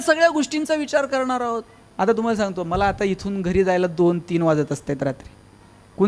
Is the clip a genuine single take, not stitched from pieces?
no; 1 cut; at 1.8 s

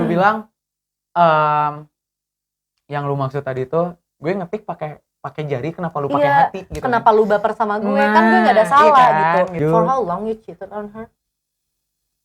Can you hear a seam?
yes; 1 cut; at 9.6 s

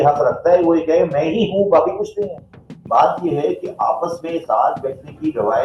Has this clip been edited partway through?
yes; 1 cut; at 2.7 s

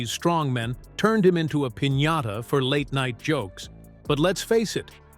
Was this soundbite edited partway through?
no; 0 cuts

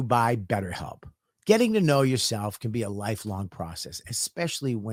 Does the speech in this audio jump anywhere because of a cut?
no; 0 cuts

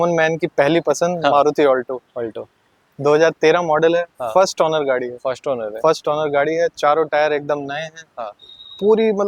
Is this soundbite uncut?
yes; 0 cuts

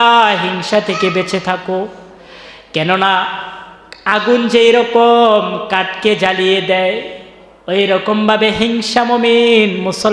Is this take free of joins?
yes; 0 cuts

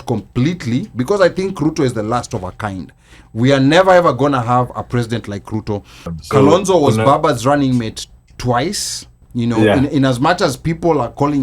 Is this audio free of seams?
no; 1 cut; at 6.1 s

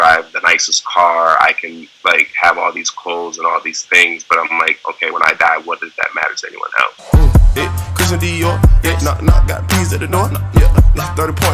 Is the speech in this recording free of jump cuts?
no; 1 cut; at 7.0 s

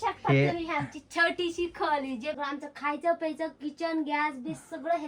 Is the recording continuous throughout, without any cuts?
no; 1 cut; at 2.4 s

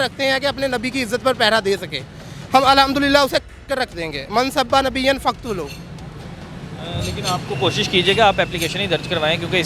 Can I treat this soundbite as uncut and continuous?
yes; 0 cuts

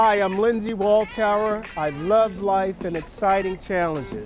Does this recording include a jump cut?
no; 0 cuts

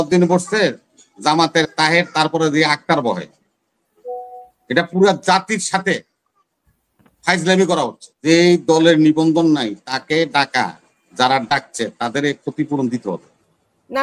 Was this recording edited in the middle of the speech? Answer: yes; 1 cut; at 8.3 s

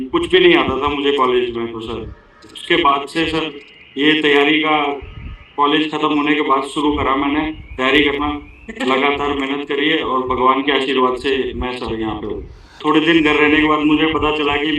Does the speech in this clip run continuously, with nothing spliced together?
no; 1 cut; at 12.8 s

